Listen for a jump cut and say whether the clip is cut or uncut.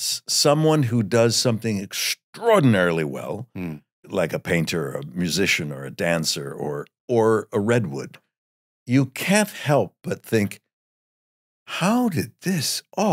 cut